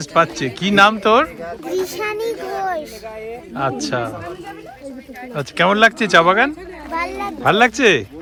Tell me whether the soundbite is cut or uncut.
uncut